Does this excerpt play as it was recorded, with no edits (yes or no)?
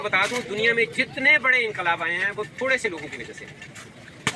yes